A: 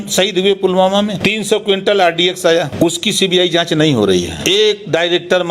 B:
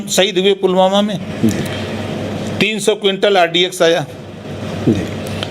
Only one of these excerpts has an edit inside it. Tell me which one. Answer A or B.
A